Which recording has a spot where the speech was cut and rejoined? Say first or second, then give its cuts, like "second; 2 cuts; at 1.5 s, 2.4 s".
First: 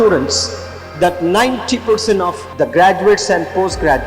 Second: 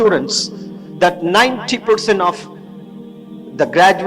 first; 1 cut; at 2.4 s